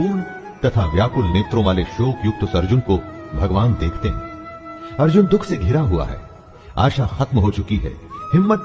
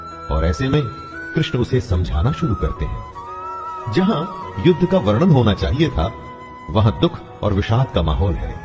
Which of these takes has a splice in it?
first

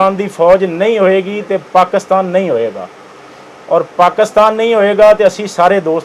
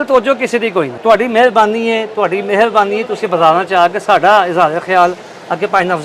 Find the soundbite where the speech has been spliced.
second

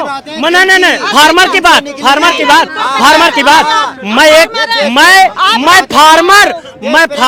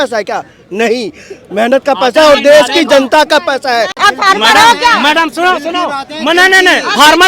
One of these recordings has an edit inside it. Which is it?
second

